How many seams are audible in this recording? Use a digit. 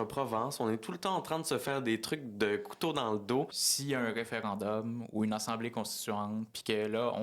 1